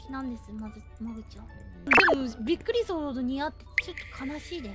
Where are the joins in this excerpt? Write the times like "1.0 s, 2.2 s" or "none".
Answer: 1.9 s